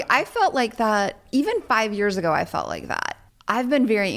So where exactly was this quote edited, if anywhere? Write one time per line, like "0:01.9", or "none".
0:03.1